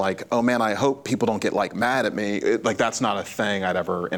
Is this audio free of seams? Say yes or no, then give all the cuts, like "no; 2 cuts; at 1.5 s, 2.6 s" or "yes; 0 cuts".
yes; 0 cuts